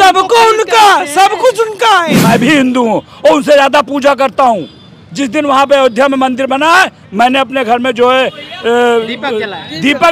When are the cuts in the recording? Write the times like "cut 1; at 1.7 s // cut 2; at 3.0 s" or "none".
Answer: cut 1; at 2.2 s